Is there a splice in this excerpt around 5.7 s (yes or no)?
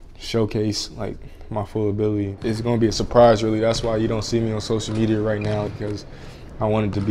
yes